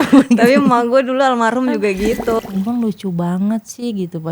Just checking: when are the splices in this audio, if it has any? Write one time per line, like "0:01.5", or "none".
0:02.4